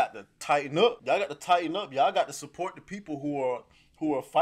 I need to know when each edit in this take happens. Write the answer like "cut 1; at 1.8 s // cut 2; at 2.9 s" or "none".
cut 1; at 1.0 s